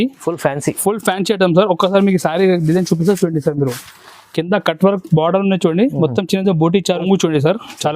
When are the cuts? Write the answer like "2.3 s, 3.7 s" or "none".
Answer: 7.0 s